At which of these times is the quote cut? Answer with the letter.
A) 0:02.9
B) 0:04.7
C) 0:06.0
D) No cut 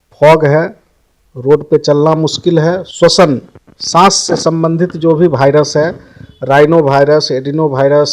A